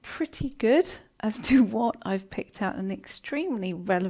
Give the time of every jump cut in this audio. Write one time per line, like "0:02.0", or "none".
0:02.9